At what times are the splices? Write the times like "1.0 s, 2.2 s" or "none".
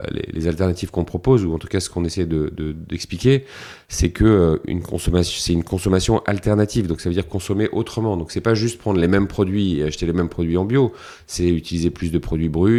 none